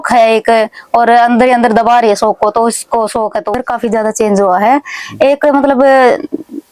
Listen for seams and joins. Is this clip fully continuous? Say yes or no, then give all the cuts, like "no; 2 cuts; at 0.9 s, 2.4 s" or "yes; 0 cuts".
no; 1 cut; at 3.5 s